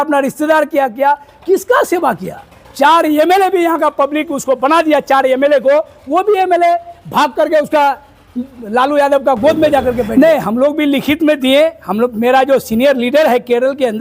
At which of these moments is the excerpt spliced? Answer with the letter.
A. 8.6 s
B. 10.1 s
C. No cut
B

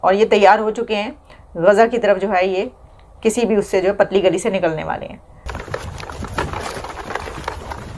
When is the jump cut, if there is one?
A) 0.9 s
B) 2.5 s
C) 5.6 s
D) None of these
C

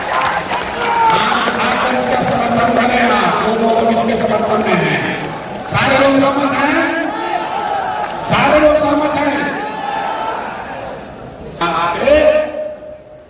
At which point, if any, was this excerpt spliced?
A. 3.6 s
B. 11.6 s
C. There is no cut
B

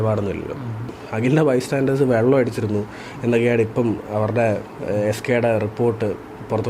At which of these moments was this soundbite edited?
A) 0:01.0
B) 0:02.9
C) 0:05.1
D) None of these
A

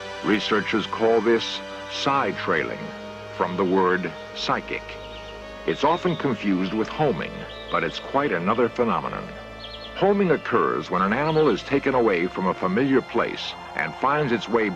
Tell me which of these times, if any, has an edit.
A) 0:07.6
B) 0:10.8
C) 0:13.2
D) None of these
A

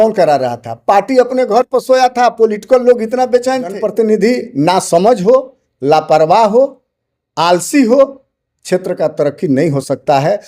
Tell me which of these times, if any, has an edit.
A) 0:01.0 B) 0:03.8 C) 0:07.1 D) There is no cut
B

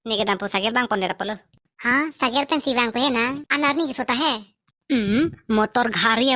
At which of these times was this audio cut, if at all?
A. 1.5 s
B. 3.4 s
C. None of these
B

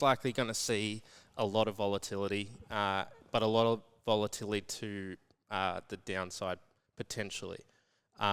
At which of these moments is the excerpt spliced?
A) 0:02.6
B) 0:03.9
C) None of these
C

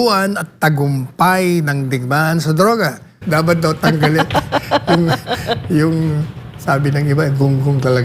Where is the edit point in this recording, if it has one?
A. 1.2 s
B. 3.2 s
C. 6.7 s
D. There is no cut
B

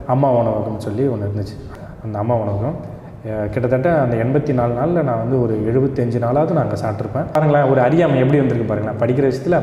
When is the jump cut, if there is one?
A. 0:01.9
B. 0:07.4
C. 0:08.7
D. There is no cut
B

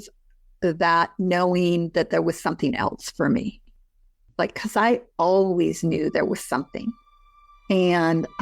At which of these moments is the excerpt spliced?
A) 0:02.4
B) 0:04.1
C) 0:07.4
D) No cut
B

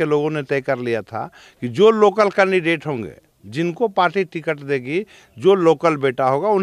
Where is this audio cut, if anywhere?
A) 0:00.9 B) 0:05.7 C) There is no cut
C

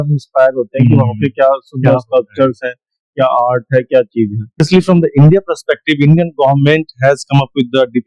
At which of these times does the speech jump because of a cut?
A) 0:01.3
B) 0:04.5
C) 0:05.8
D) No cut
B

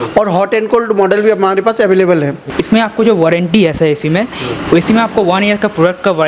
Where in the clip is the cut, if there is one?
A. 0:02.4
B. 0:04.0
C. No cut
A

